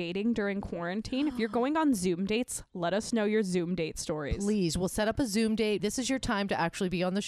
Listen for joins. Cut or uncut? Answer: uncut